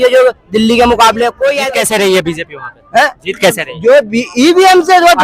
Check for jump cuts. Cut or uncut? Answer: cut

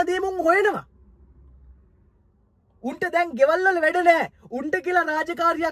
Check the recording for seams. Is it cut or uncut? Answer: uncut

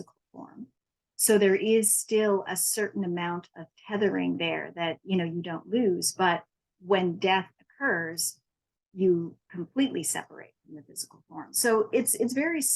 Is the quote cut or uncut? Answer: cut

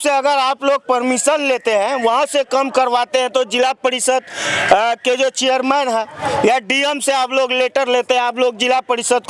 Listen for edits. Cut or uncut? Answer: uncut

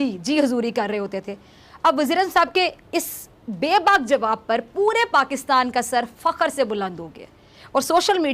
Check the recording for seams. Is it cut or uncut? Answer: uncut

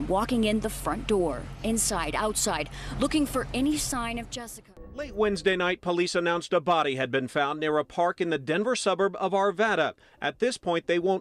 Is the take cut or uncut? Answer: cut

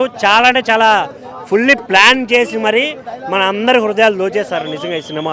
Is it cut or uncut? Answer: uncut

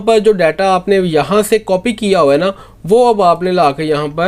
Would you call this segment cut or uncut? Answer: uncut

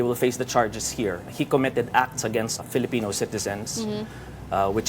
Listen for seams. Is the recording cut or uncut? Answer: cut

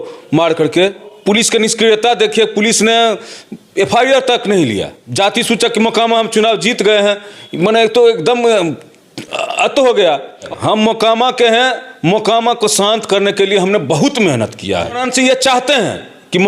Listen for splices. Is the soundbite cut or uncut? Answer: cut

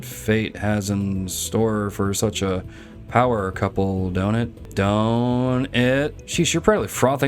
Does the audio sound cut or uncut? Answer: cut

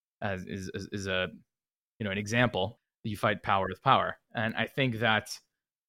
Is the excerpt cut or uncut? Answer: cut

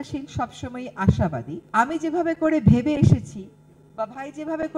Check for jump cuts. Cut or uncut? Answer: uncut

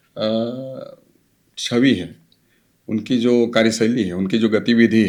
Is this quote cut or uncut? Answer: uncut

